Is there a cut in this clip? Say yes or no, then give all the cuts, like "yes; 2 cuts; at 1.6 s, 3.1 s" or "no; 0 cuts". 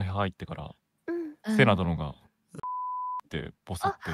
no; 0 cuts